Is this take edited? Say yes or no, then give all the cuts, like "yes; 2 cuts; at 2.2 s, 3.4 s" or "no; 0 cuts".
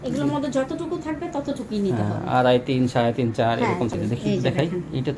yes; 1 cut; at 3.9 s